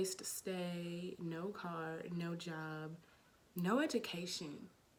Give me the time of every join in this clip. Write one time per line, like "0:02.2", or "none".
none